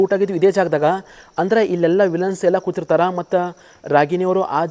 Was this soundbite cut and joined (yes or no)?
no